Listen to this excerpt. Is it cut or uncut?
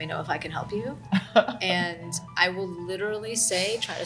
uncut